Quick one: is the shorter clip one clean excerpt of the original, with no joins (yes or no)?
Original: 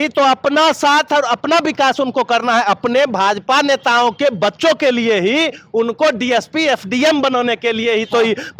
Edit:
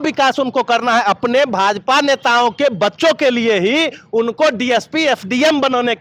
yes